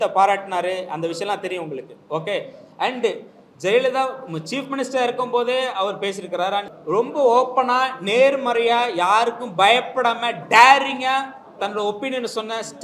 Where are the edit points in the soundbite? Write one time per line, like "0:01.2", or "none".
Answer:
0:06.7